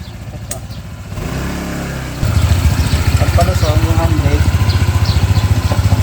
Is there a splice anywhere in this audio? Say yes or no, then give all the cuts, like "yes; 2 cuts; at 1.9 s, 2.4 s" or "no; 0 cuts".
yes; 1 cut; at 2.2 s